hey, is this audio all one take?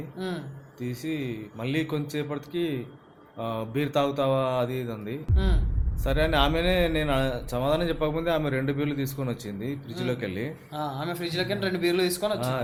yes; 0 cuts

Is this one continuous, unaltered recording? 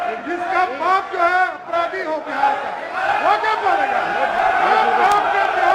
no; 1 cut; at 4.4 s

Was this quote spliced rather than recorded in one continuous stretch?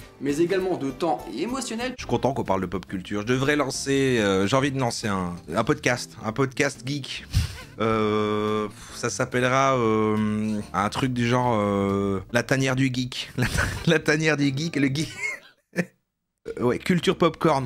yes; 1 cut; at 2.0 s

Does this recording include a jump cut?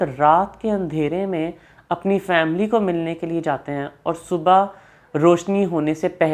no; 0 cuts

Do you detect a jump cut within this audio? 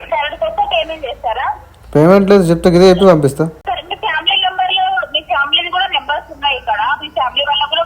yes; 1 cut; at 3.6 s

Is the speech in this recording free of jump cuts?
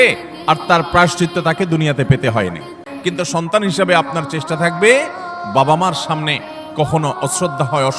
no; 1 cut; at 2.9 s

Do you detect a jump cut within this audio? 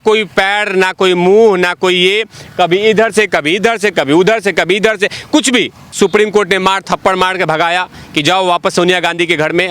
yes; 1 cut; at 5.9 s

